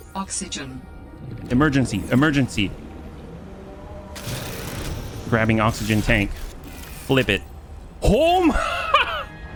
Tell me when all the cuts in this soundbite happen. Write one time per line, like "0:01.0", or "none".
none